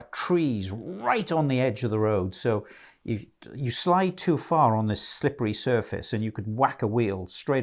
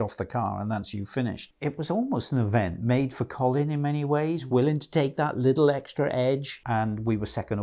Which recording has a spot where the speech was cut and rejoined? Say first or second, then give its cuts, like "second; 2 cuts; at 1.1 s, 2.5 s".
second; 2 cuts; at 1.5 s, 6.5 s